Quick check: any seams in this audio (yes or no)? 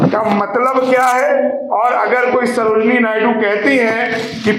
no